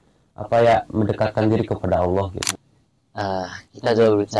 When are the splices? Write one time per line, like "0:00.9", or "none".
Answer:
0:02.5

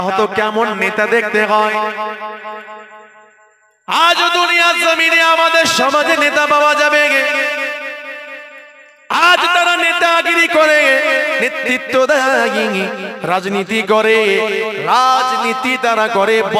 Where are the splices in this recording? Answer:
none

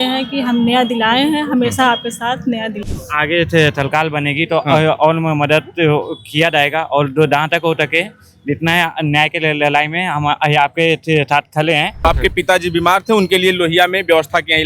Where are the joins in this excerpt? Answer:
0:03.0
0:12.1

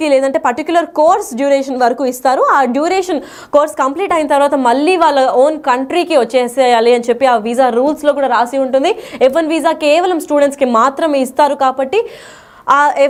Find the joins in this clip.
none

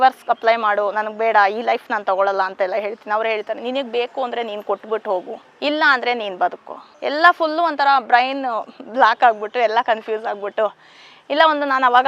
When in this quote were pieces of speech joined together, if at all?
none

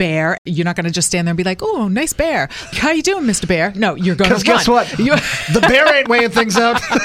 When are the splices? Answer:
none

